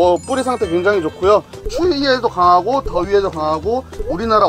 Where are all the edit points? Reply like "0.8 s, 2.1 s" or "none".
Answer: 1.7 s